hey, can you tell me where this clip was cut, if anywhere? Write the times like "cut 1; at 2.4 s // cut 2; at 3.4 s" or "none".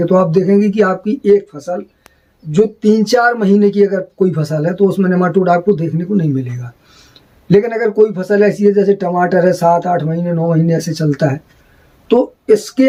none